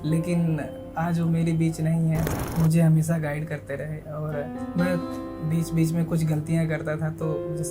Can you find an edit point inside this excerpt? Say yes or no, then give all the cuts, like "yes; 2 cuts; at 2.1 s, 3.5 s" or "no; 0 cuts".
yes; 1 cut; at 2.3 s